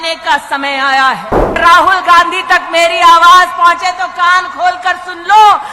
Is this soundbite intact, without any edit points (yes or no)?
no